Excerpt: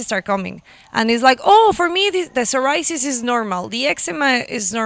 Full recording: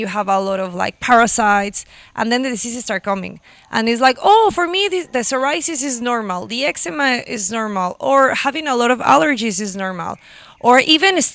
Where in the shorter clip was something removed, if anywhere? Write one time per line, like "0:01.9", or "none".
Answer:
none